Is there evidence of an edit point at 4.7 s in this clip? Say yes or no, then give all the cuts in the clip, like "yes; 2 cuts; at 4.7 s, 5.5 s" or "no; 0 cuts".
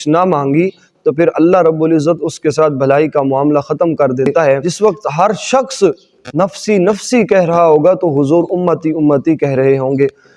yes; 1 cut; at 4.7 s